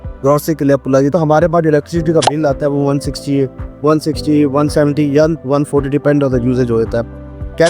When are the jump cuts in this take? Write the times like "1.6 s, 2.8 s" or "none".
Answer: 1.1 s